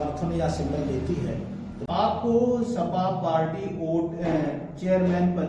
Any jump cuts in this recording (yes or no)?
yes